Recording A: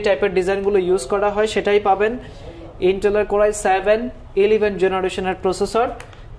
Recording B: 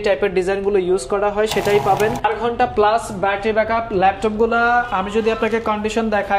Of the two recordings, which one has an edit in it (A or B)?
B